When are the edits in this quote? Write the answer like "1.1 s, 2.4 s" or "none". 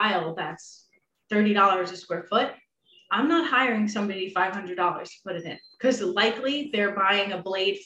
none